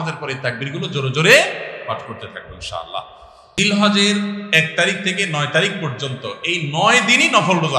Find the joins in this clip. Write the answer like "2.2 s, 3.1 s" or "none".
3.6 s